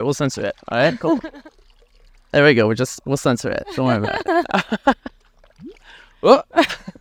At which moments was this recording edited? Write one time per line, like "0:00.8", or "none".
none